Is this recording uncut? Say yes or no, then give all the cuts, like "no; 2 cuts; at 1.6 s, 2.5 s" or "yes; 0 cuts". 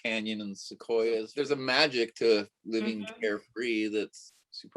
no; 1 cut; at 1.3 s